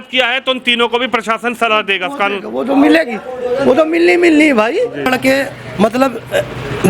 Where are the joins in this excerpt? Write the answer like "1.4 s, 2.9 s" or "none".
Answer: 5.1 s